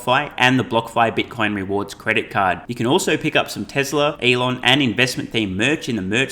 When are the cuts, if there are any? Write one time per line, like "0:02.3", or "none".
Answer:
0:04.2